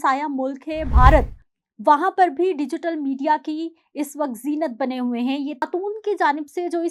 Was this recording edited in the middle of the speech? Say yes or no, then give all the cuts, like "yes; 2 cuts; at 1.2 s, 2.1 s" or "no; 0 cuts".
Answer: yes; 1 cut; at 5.6 s